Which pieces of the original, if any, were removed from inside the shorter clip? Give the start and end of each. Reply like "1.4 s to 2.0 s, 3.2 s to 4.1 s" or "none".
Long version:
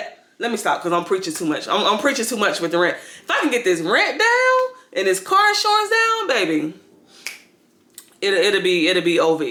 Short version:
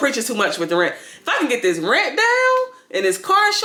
none